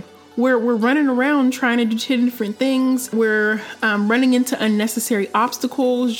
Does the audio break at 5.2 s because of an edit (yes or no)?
no